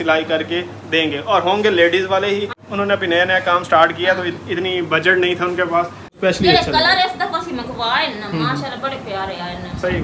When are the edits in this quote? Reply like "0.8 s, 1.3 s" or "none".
2.6 s, 6.2 s